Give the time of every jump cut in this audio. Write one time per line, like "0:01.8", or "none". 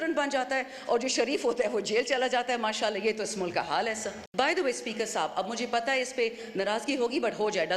0:04.2